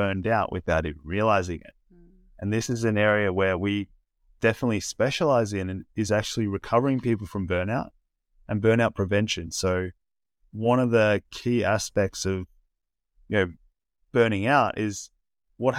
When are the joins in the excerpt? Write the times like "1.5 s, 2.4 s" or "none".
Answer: none